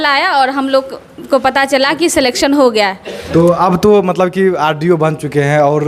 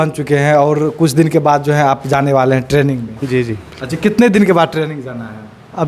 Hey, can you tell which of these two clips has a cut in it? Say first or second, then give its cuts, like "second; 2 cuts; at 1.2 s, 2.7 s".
first; 1 cut; at 3.1 s